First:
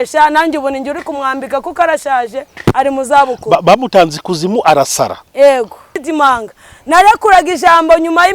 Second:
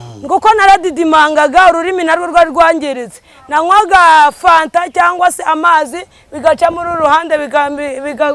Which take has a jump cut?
first; 1 cut; at 6.0 s

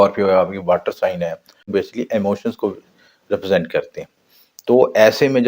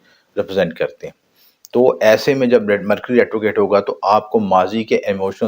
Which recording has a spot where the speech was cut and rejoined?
first; 1 cut; at 1.7 s

